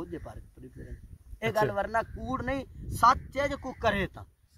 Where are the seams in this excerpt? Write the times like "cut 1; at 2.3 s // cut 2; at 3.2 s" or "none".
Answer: none

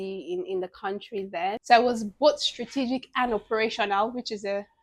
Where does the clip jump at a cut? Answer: cut 1; at 1.6 s

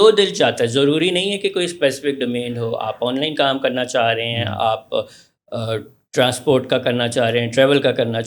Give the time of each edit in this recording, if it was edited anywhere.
none

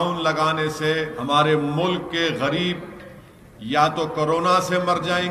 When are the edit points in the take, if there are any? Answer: cut 1; at 1.1 s

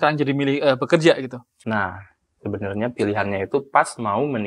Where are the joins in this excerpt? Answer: cut 1; at 1.5 s

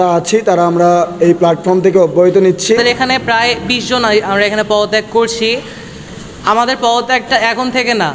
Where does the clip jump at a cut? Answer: cut 1; at 2.8 s

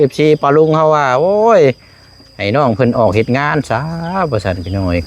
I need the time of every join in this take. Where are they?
none

